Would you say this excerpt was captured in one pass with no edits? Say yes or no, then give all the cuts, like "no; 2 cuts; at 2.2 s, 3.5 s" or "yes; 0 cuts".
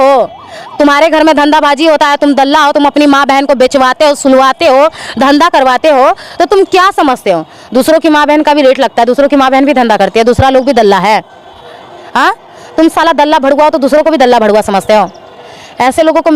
yes; 0 cuts